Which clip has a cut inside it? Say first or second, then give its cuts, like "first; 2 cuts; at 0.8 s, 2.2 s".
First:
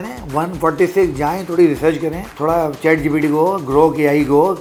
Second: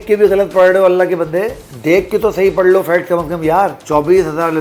second; 2 cuts; at 1.6 s, 3.8 s